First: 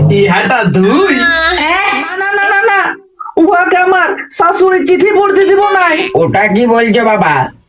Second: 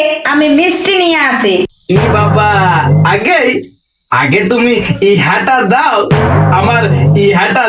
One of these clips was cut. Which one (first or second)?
first